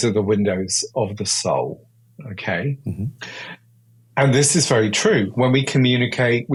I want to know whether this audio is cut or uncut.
uncut